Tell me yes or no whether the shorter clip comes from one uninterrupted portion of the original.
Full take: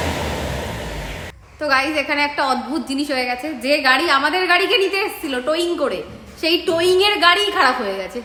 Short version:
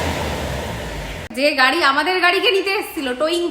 no